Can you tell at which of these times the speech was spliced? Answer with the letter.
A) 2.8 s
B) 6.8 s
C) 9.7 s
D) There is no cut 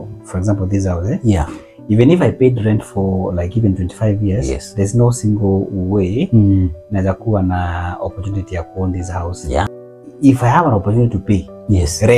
C